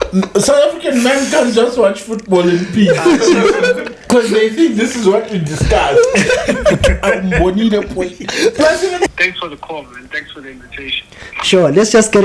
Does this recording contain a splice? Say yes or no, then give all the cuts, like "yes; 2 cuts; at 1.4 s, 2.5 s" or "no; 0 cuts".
yes; 1 cut; at 9.1 s